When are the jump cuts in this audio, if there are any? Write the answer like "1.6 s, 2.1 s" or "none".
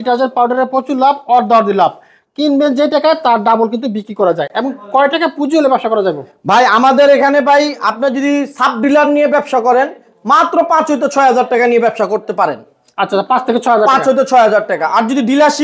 none